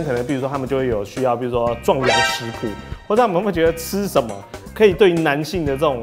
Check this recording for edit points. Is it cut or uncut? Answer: uncut